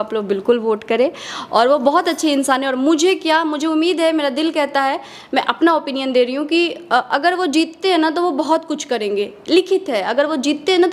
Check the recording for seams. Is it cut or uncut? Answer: uncut